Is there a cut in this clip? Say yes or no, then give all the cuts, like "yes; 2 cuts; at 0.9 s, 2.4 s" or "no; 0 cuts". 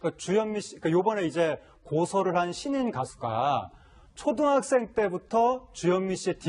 no; 0 cuts